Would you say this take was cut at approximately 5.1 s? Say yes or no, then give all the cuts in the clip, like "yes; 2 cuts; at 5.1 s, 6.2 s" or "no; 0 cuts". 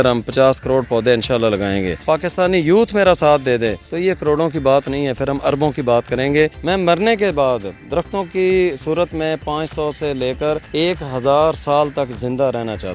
no; 4 cuts; at 2.0 s, 3.9 s, 6.6 s, 10.7 s